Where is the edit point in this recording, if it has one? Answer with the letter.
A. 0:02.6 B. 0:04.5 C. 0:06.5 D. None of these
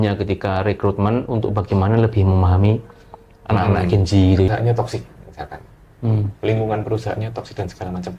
B